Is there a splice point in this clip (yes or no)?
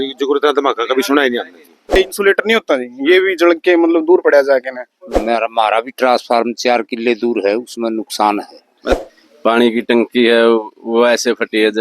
yes